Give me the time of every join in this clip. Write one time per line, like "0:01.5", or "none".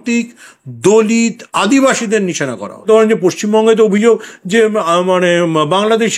0:02.9